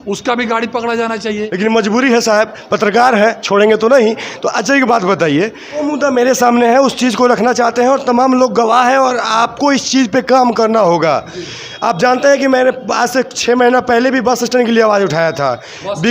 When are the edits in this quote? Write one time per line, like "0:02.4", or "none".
0:01.4
0:05.7